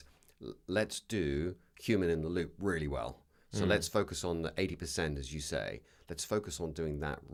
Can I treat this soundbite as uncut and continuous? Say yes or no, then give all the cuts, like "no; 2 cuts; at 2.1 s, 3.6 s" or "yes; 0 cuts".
yes; 0 cuts